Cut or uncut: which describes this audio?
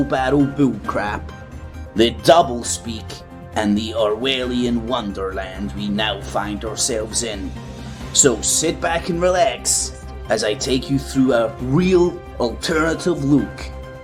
uncut